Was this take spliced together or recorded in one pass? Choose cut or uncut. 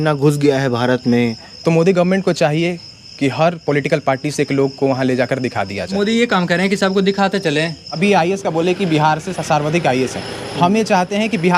cut